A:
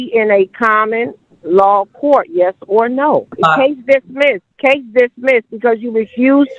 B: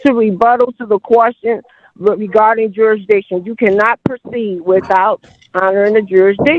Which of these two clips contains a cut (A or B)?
A